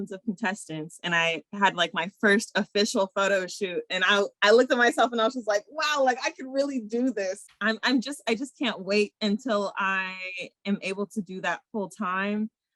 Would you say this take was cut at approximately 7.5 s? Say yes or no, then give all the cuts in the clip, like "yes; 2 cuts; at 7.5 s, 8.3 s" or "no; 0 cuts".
yes; 1 cut; at 7.5 s